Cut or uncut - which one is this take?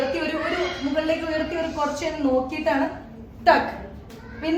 uncut